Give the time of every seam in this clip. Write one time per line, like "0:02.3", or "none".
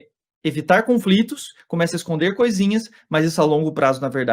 none